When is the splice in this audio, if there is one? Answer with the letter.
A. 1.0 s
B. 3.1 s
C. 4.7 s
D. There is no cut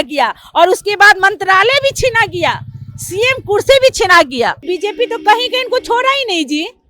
C